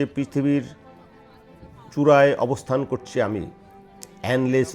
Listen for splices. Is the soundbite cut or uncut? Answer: uncut